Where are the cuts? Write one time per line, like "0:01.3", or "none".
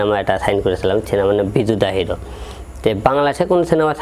none